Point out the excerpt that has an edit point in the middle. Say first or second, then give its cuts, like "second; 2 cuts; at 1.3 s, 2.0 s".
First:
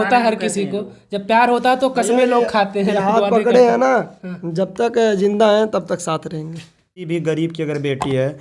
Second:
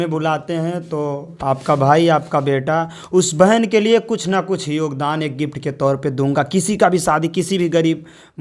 first; 1 cut; at 7.1 s